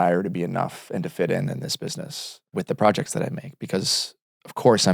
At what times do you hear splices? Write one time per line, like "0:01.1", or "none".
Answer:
0:02.5